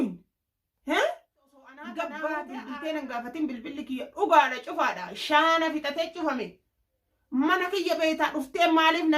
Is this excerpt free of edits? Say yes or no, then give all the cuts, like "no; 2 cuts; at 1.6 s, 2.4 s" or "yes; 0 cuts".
no; 1 cut; at 2.5 s